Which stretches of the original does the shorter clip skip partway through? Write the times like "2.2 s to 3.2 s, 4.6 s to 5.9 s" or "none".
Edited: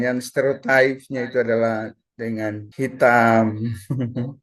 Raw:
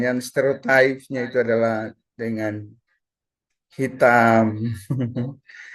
2.6 s to 3.6 s